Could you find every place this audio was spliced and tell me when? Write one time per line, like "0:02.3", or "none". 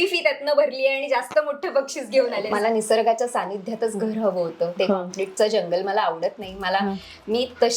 0:02.5